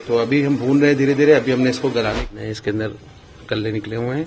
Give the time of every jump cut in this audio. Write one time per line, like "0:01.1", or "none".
0:02.2